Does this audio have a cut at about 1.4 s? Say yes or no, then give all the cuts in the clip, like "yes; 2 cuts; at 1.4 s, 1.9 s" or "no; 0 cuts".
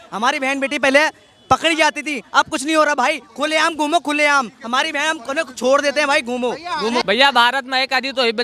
no; 1 cut; at 7.0 s